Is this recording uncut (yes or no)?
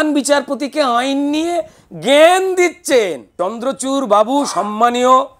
no